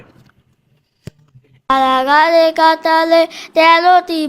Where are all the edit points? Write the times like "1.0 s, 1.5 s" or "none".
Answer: 1.7 s